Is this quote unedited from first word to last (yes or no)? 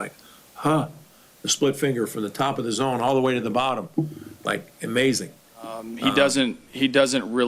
no